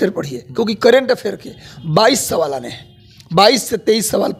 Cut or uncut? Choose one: uncut